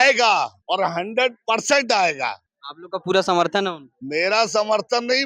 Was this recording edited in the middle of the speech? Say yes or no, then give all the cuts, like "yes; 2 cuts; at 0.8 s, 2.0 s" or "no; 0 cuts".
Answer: no; 0 cuts